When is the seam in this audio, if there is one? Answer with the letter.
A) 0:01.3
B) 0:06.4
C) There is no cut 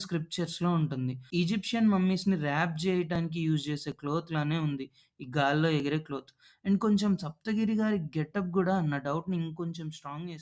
A